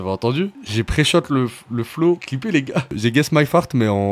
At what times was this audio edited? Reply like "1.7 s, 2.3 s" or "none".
2.9 s